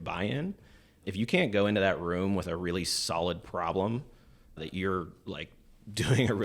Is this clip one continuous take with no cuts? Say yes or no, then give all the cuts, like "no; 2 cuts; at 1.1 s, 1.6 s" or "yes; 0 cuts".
no; 2 cuts; at 1.0 s, 4.6 s